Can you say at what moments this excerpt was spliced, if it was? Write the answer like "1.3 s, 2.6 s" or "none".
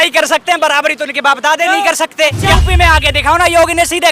2.4 s